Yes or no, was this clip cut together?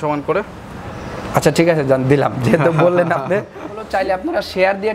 yes